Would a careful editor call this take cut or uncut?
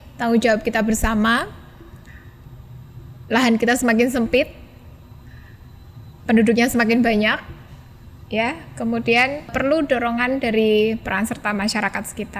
cut